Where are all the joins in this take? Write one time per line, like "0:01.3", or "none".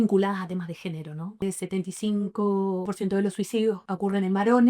0:01.4
0:02.9
0:03.9